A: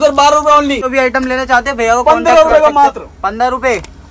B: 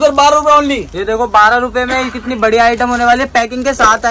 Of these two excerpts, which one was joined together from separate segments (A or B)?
A